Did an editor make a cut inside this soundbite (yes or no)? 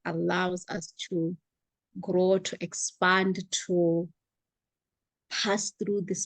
no